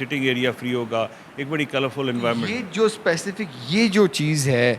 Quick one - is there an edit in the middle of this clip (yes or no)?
no